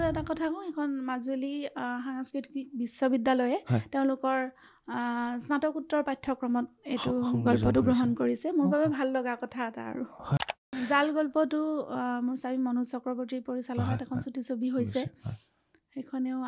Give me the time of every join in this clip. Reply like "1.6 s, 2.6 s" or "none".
10.6 s